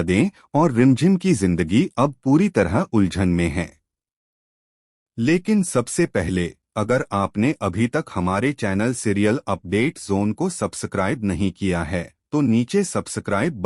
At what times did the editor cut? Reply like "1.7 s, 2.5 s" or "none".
none